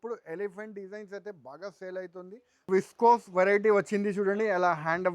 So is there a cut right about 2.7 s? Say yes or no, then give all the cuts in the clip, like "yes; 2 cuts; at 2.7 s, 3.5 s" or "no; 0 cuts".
yes; 1 cut; at 2.7 s